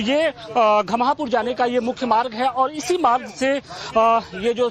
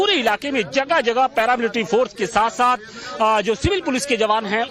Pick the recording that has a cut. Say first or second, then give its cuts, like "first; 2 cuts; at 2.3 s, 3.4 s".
first; 1 cut; at 3.8 s